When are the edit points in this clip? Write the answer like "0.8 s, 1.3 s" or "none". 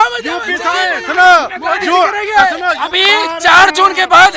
2.8 s